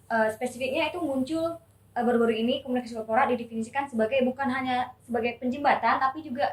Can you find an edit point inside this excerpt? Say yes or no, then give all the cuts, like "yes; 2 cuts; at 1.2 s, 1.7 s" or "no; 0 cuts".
no; 0 cuts